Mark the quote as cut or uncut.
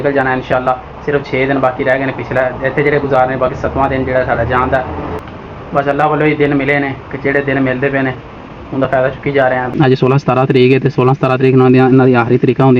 cut